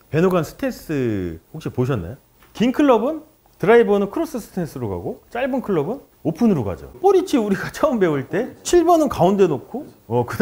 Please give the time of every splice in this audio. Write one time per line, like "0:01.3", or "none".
0:06.9